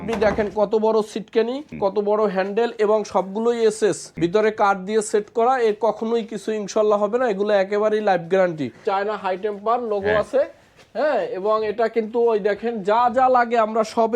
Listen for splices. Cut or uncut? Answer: cut